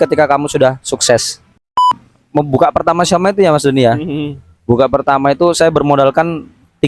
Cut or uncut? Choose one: cut